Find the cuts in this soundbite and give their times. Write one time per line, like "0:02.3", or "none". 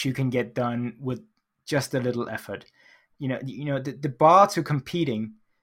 0:03.1